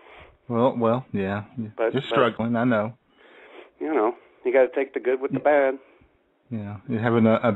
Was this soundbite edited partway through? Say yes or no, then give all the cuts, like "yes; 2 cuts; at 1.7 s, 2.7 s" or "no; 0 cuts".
no; 0 cuts